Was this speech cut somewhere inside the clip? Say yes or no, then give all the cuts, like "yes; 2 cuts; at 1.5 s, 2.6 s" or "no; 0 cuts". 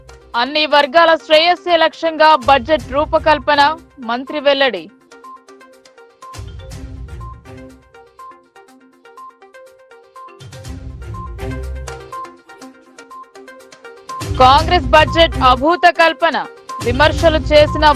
no; 0 cuts